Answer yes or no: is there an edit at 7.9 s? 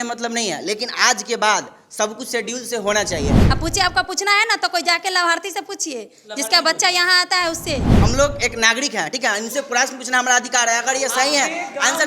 yes